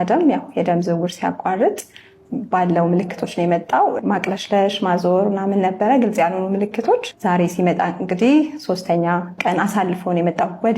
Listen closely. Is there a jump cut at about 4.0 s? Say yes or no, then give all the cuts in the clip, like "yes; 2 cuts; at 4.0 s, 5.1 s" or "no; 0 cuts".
yes; 2 cuts; at 4.0 s, 7.1 s